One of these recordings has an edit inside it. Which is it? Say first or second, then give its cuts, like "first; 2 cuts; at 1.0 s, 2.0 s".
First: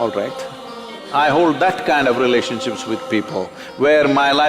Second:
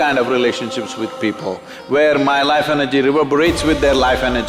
first; 1 cut; at 1.0 s